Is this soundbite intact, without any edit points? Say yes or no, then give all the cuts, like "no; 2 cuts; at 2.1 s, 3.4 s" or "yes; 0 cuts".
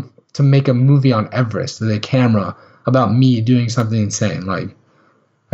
yes; 0 cuts